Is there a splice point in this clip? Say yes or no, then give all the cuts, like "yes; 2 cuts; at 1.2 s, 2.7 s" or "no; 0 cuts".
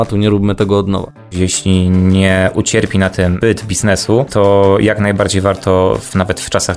yes; 2 cuts; at 1.3 s, 4.3 s